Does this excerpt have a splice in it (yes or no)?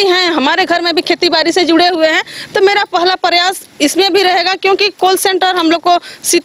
no